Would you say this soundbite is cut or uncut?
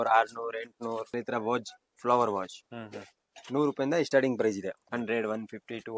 cut